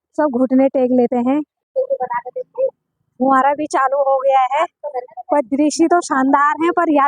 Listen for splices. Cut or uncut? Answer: cut